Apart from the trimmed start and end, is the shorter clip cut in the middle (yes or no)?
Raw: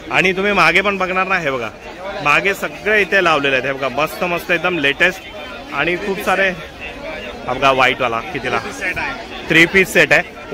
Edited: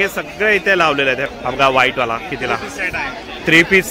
yes